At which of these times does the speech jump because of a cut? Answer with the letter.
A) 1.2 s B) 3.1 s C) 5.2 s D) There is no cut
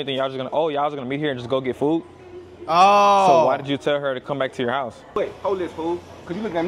C